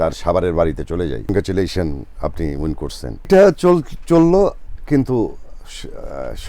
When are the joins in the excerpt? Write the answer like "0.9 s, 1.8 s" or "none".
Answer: 1.3 s, 3.3 s